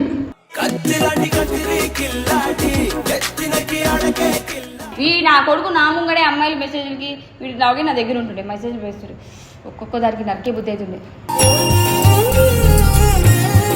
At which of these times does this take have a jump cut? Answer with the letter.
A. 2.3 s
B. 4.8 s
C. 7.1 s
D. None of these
B